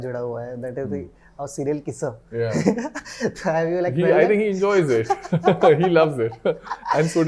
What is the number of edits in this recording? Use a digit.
0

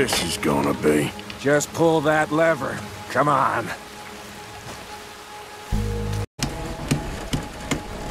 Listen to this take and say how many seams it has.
1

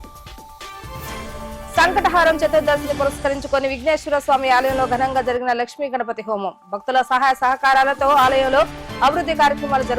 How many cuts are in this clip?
1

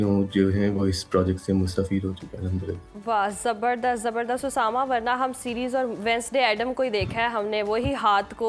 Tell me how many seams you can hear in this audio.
0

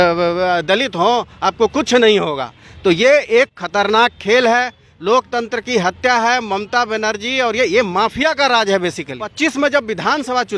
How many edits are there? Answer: 1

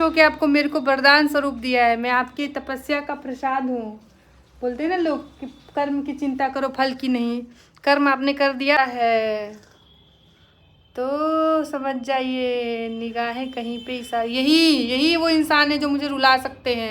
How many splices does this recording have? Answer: 1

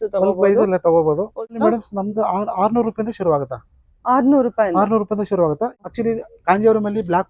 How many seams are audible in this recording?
2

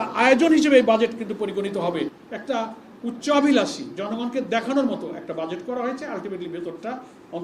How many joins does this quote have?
1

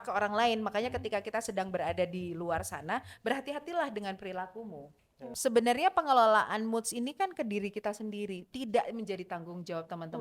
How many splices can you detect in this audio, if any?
1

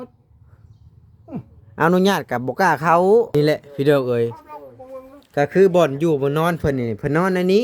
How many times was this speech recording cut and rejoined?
1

